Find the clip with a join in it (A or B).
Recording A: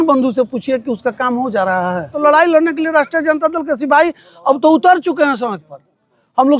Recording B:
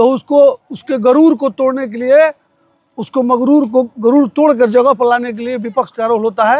A